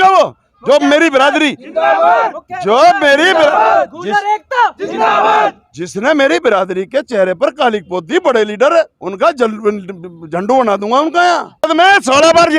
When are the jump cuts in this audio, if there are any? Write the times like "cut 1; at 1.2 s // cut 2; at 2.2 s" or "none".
cut 1; at 11.7 s